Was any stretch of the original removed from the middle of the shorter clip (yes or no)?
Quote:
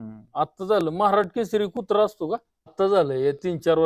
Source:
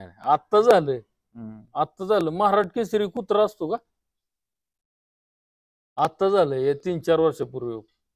yes